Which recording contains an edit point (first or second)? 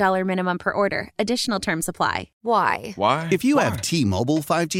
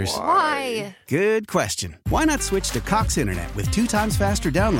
first